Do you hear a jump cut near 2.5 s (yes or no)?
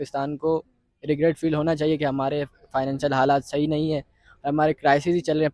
no